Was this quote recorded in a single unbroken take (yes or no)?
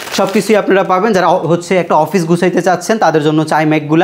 yes